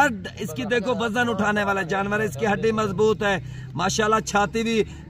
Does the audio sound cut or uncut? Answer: uncut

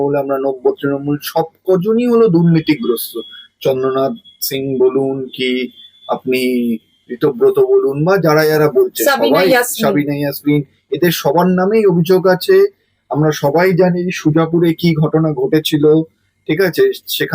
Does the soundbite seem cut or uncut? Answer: uncut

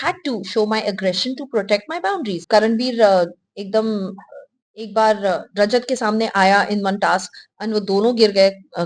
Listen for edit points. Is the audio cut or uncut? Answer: cut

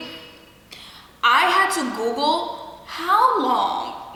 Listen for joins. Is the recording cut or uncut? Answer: uncut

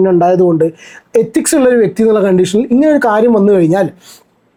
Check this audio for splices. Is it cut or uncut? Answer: uncut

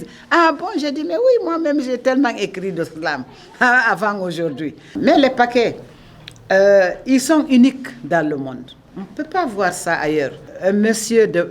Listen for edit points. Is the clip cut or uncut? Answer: cut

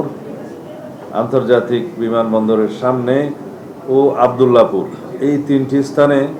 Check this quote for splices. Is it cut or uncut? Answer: uncut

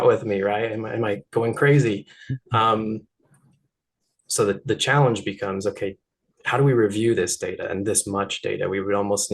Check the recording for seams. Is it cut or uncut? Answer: cut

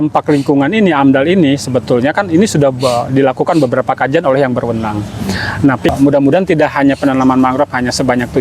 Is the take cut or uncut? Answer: cut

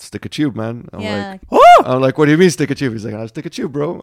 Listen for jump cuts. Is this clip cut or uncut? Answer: cut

